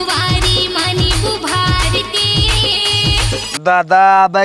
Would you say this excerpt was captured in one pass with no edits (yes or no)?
no